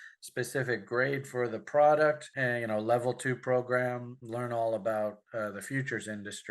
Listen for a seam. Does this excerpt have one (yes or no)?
no